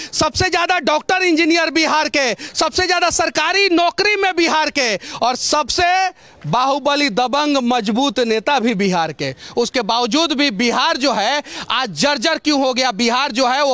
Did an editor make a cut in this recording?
no; 0 cuts

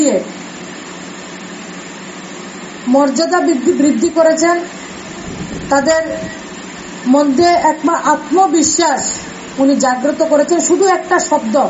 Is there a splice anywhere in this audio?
no; 0 cuts

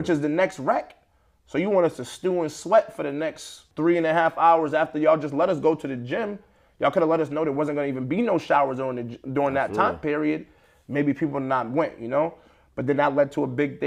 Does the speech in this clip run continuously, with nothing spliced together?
yes; 0 cuts

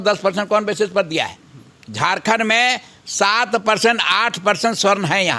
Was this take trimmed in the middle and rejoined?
no; 0 cuts

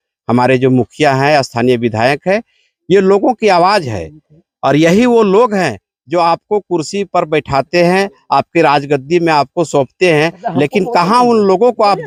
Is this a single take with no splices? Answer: yes; 0 cuts

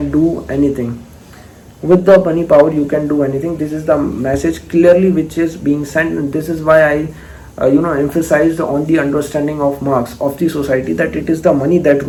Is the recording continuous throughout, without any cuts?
yes; 0 cuts

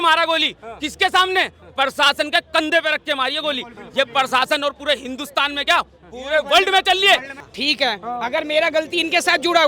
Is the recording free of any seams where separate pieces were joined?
no; 1 cut; at 7.3 s

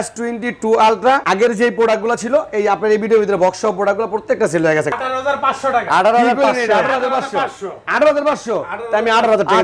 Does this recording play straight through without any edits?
no; 2 cuts; at 1.2 s, 4.9 s

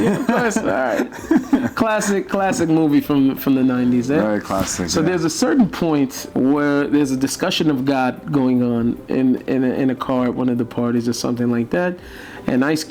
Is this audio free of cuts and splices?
no; 1 cut; at 6.2 s

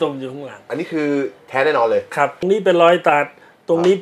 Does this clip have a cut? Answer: yes; 1 cut; at 2.4 s

